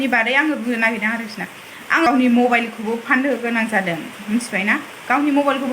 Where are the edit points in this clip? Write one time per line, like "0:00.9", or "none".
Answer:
0:02.1